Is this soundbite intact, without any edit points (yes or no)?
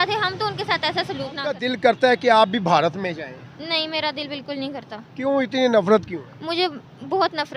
no